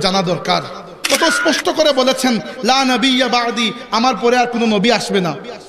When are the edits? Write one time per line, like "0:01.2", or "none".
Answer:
0:01.0